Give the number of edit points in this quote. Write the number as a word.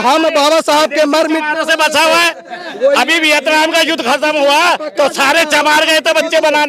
zero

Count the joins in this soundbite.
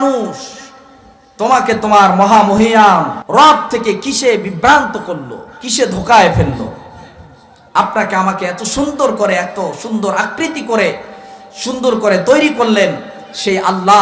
one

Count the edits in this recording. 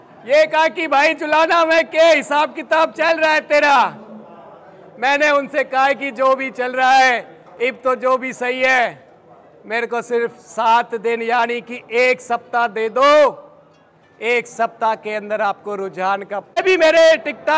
one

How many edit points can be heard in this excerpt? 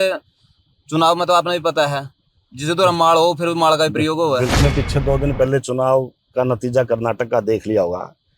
one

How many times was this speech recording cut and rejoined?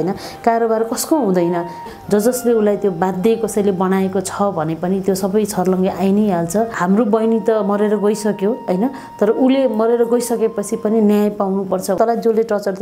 three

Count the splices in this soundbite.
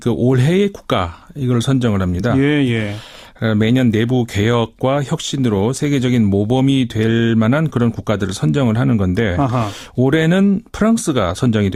zero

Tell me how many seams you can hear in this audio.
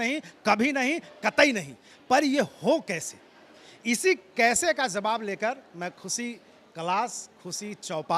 zero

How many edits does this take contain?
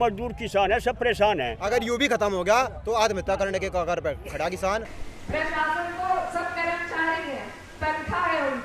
two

